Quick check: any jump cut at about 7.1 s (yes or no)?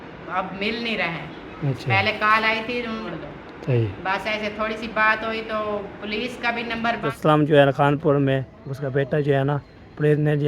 yes